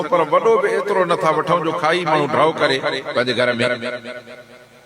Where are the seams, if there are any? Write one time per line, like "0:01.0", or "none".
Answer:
none

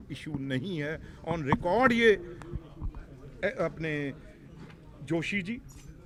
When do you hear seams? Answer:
none

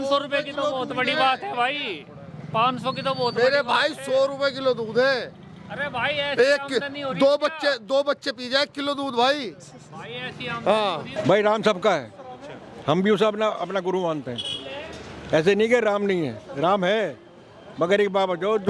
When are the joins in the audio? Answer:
0:11.1

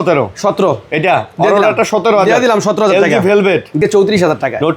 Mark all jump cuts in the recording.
0:03.8

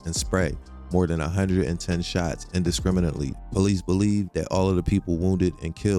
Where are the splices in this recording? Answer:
0:03.4

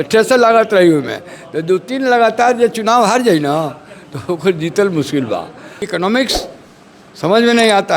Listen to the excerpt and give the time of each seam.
0:05.9

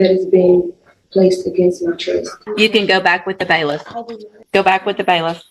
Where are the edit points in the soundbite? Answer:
0:02.4
0:04.4

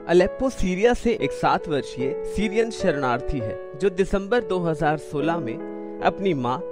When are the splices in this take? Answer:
none

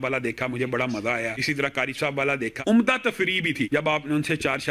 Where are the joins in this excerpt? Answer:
0:01.4
0:02.6
0:03.7

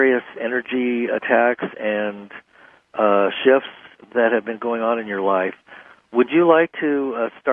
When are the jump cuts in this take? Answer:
none

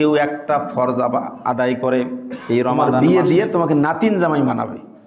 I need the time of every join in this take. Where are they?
0:02.8

